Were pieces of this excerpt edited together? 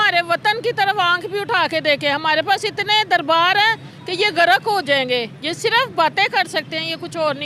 no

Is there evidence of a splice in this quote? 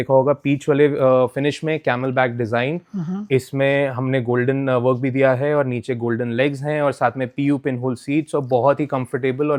no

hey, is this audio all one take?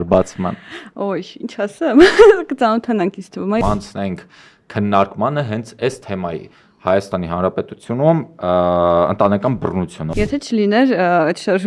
no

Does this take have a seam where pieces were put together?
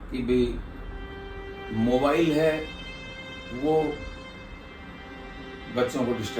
no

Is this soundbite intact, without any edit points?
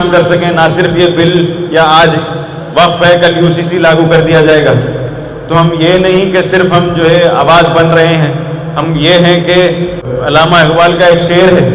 no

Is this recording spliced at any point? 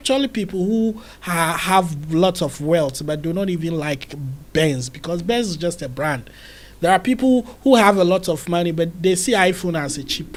no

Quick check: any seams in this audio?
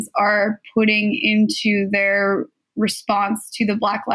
no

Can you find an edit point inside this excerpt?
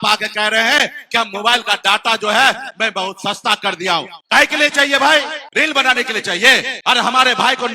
yes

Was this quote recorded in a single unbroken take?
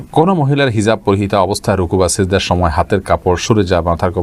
yes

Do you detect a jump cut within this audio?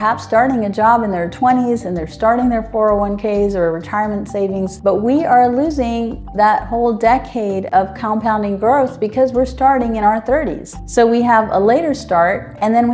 no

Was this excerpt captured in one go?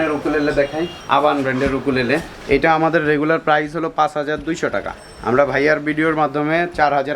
no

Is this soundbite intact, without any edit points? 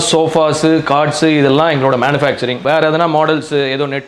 no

